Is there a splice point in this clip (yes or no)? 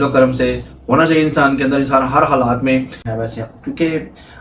yes